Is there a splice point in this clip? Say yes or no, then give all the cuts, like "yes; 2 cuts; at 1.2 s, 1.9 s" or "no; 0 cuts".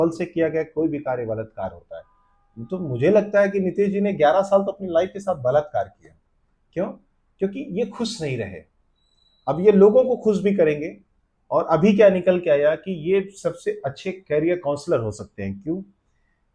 no; 0 cuts